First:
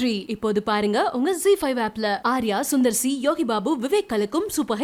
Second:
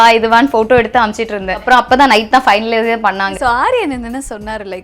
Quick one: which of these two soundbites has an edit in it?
second; 2 cuts; at 1.6 s, 3.3 s

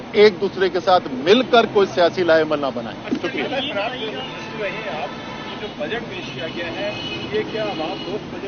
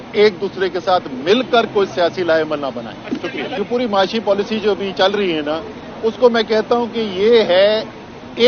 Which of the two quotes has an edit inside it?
second; 1 cut; at 3.6 s

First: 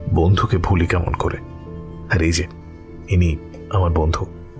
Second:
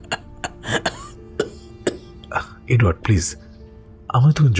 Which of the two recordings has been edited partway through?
second; 1 cut; at 2.2 s

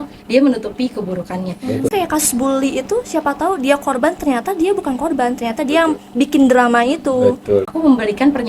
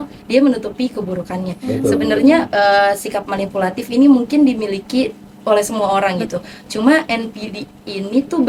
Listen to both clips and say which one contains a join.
first; 2 cuts; at 1.9 s, 7.7 s

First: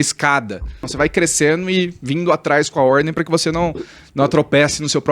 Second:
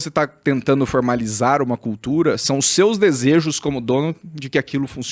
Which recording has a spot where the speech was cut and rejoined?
first; 1 cut; at 0.9 s

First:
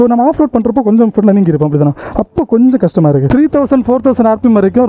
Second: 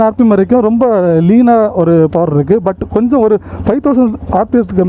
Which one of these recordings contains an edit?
first; 1 cut; at 3.3 s

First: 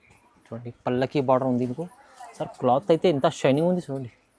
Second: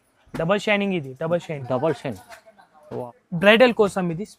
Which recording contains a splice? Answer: second; 1 cut; at 3.1 s

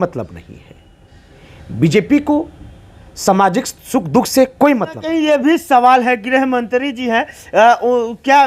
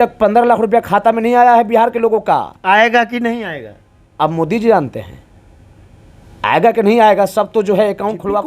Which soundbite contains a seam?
first; 1 cut; at 5.1 s

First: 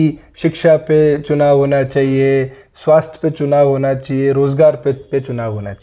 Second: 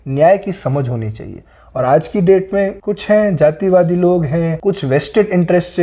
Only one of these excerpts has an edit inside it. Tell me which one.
second; 2 cuts; at 2.9 s, 4.5 s

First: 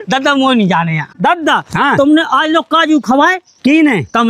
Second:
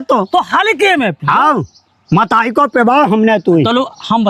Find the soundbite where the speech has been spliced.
first; 1 cut; at 1.1 s

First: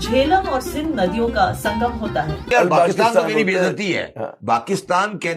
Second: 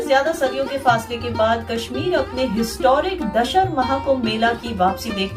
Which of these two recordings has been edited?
first; 1 cut; at 2.5 s

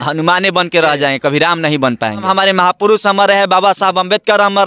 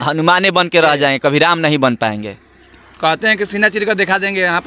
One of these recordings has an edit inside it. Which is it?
first; 1 cut; at 2.2 s

